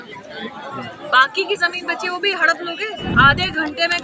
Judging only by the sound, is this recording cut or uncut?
cut